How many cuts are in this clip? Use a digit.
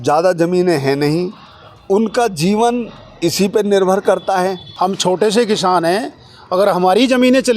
1